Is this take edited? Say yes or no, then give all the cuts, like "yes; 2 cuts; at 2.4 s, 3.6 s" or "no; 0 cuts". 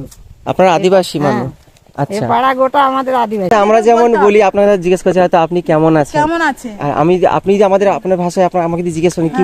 yes; 1 cut; at 3.5 s